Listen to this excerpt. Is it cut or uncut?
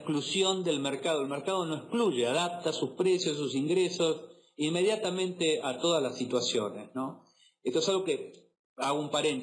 cut